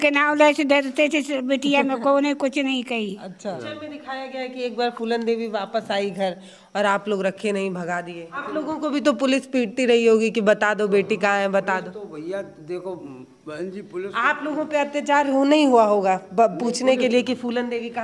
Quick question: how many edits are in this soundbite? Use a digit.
2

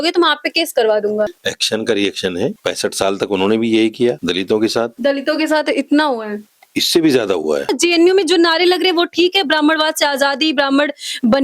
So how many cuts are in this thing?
5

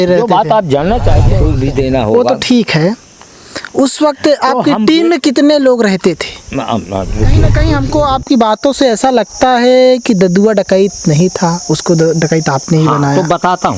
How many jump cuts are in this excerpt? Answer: 2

